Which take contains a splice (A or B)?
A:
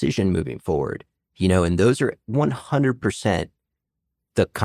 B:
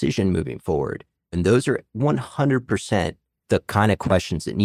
B